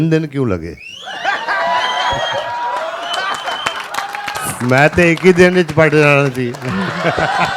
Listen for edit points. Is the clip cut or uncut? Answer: uncut